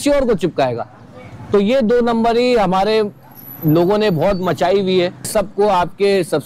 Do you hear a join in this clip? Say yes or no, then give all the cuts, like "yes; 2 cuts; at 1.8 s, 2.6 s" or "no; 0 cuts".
yes; 1 cut; at 5.3 s